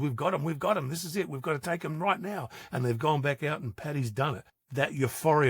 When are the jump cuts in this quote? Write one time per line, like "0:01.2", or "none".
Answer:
0:04.6